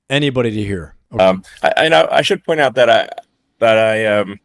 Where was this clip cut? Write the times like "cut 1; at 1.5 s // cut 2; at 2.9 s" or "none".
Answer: cut 1; at 1.0 s